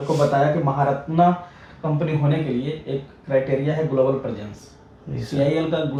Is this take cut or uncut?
uncut